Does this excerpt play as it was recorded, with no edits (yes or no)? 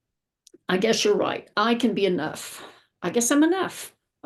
yes